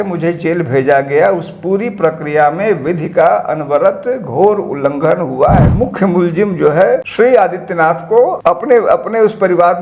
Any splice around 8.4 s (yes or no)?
yes